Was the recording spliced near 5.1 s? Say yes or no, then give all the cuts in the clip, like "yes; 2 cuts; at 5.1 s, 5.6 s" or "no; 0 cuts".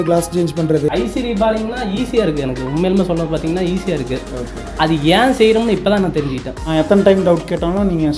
no; 2 cuts; at 0.9 s, 6.6 s